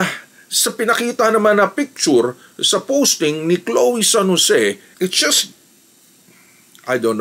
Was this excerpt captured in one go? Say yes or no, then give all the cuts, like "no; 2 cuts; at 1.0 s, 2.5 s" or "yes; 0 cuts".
no; 1 cut; at 5.0 s